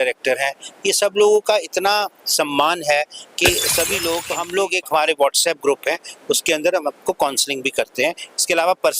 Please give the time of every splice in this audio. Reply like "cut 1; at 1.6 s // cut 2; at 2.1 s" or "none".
cut 1; at 4.2 s